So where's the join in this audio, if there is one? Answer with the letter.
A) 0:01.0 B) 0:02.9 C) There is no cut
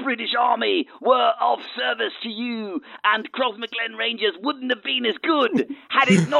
C